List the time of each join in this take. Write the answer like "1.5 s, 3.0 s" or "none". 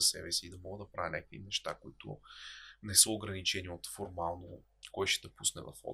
none